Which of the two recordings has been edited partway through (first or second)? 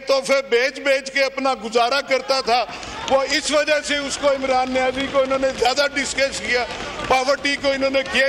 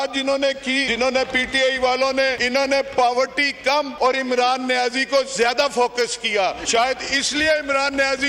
second